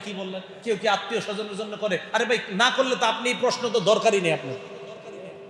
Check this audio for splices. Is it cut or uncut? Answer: uncut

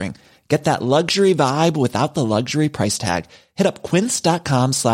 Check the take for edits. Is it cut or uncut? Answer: uncut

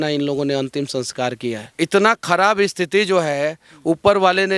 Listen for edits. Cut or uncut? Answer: cut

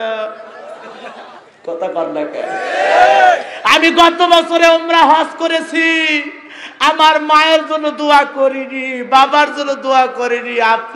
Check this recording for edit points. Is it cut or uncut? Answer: uncut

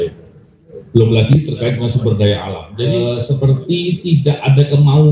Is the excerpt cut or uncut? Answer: cut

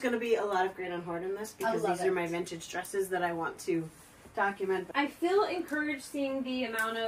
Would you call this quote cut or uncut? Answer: uncut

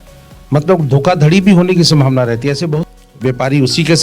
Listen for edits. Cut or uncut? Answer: cut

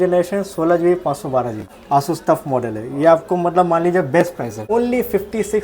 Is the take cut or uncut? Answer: cut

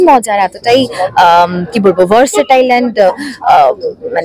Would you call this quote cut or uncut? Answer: uncut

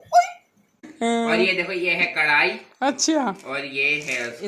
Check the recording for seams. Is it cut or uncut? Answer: cut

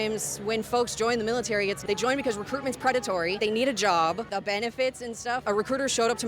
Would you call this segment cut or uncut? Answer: cut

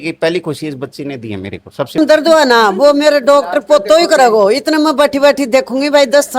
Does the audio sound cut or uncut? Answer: cut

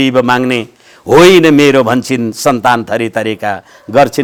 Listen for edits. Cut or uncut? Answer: uncut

